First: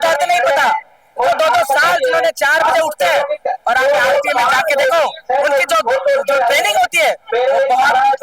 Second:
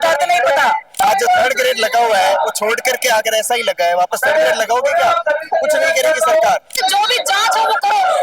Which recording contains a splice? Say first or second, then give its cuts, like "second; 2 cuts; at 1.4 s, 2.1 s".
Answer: second; 2 cuts; at 1.0 s, 6.8 s